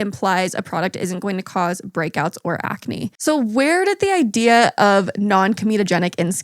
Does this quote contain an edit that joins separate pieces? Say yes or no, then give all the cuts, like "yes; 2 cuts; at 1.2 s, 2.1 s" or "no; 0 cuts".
yes; 1 cut; at 3.2 s